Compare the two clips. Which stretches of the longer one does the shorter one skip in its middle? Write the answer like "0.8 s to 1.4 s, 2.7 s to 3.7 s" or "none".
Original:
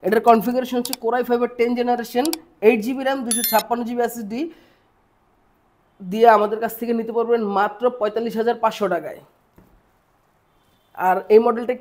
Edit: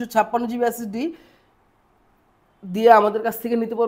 none